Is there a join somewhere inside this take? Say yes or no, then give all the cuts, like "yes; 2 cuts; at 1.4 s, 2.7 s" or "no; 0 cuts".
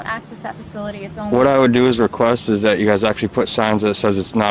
no; 0 cuts